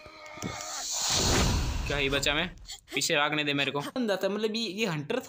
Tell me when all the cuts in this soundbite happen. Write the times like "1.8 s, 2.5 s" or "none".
4.0 s

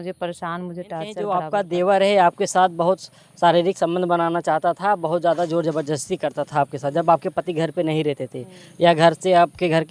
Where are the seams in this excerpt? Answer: 1.3 s

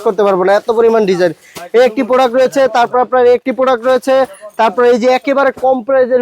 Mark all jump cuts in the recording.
none

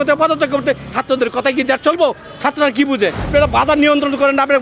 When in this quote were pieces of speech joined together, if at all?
0.9 s, 3.3 s

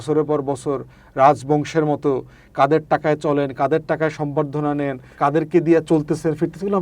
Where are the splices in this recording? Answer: 5.0 s

